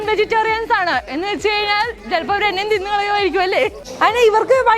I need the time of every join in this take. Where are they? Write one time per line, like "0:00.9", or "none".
0:03.8